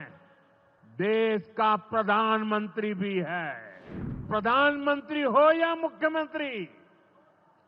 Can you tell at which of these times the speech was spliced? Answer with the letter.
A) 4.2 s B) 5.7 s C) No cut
A